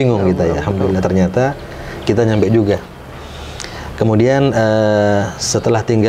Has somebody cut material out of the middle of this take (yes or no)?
no